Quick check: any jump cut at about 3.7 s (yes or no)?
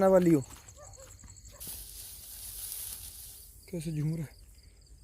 no